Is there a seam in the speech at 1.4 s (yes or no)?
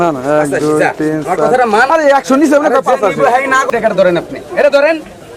no